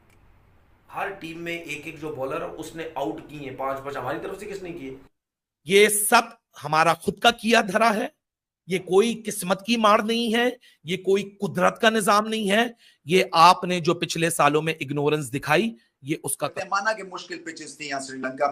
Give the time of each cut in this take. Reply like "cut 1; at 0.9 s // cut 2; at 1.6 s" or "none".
cut 1; at 16.6 s